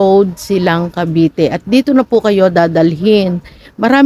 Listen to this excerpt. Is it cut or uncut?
uncut